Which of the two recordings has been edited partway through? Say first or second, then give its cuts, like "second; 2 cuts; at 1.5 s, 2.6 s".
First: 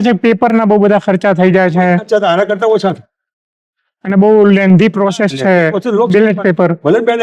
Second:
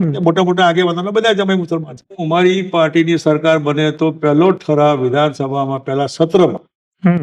second; 1 cut; at 2.1 s